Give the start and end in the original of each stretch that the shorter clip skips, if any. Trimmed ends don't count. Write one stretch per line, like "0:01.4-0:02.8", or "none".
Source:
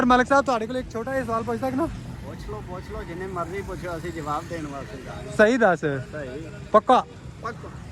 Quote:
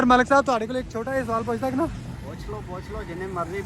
none